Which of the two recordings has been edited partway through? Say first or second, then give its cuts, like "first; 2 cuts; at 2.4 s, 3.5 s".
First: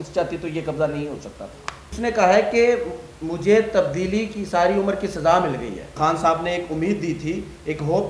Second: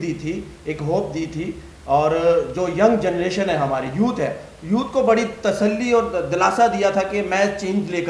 first; 2 cuts; at 1.9 s, 5.9 s